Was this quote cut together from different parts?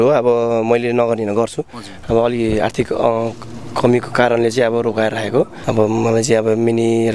yes; 1 cut; at 5.6 s

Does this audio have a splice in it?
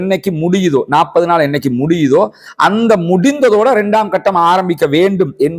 no; 0 cuts

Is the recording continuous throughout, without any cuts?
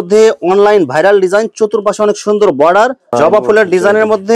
no; 1 cut; at 3.0 s

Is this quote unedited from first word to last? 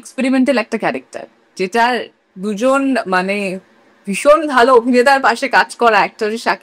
no; 1 cut; at 2.2 s

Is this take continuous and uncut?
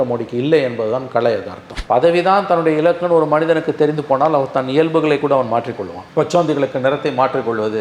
no; 1 cut; at 1.7 s

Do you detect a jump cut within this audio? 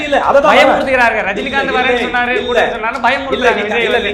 no; 0 cuts

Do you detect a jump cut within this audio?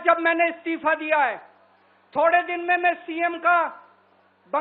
no; 0 cuts

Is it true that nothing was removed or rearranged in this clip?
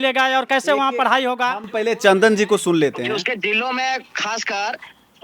yes; 0 cuts

